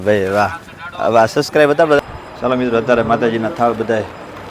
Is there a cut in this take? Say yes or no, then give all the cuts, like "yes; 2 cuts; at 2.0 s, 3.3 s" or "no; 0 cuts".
yes; 1 cut; at 2.0 s